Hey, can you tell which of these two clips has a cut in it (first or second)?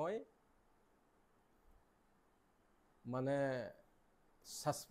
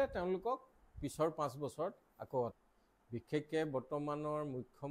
second